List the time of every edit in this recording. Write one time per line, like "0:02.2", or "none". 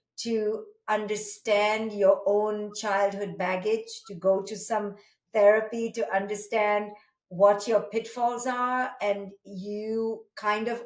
none